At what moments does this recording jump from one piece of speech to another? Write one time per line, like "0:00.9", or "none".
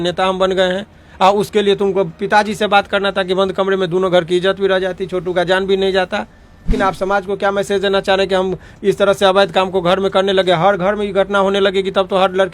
0:06.7